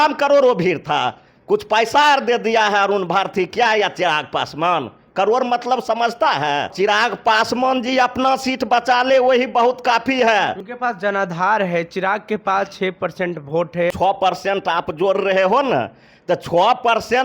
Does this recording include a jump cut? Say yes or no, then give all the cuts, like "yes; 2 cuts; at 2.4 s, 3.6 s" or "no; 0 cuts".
yes; 3 cuts; at 6.7 s, 10.6 s, 13.9 s